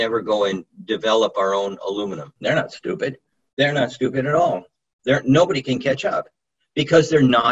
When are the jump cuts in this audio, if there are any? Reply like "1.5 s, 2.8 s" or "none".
2.2 s

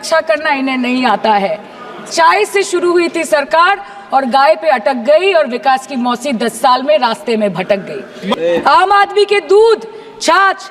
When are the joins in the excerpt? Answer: 2.0 s, 8.3 s

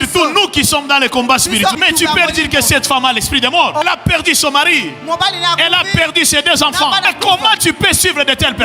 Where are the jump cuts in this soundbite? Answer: 1.7 s, 3.8 s, 7.1 s

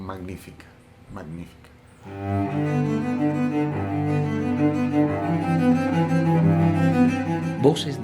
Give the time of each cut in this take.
1.9 s

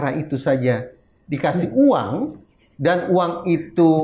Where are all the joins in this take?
none

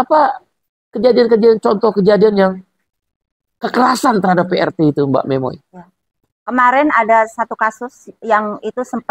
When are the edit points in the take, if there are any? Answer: none

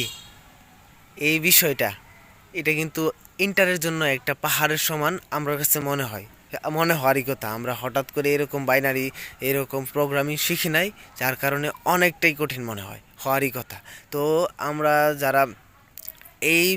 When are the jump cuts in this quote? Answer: none

